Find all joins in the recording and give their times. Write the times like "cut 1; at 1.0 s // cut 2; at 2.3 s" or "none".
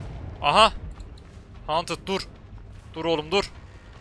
none